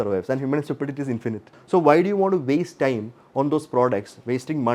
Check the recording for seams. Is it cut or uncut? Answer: cut